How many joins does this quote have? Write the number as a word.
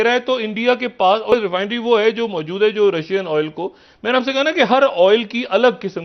one